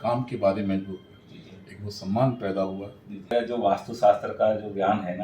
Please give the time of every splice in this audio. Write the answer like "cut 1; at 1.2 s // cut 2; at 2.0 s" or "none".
cut 1; at 3.3 s

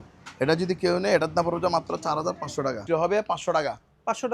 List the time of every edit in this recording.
cut 1; at 2.8 s

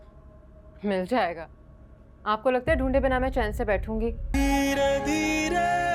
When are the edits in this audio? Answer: cut 1; at 4.2 s

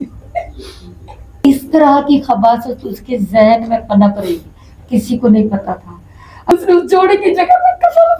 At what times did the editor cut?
cut 1; at 1.4 s // cut 2; at 6.5 s

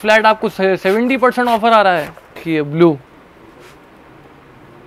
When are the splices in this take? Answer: cut 1; at 2.4 s

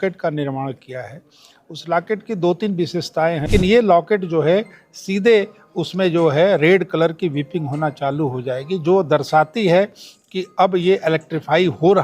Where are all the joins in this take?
cut 1; at 3.5 s

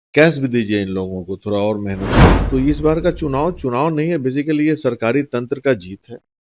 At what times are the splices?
cut 1; at 2.4 s

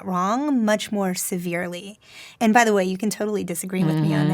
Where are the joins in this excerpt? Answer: cut 1; at 2.2 s

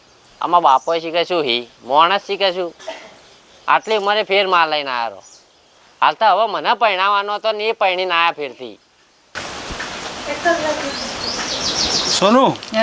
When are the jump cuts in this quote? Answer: cut 1; at 9.2 s

